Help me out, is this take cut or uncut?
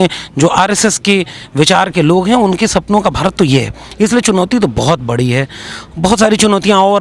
uncut